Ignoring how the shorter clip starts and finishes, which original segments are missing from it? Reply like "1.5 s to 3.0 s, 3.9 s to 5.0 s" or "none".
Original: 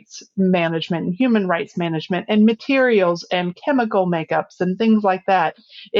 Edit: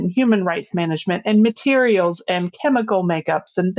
none